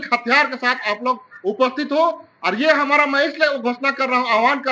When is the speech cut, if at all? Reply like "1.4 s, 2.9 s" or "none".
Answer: none